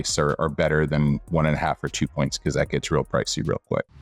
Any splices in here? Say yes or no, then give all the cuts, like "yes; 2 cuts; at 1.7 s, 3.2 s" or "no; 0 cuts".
no; 0 cuts